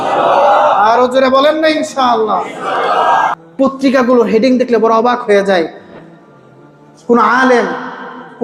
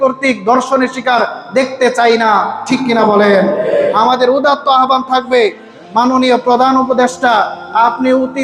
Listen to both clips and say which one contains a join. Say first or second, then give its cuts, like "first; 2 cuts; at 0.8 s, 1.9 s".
first; 1 cut; at 3.4 s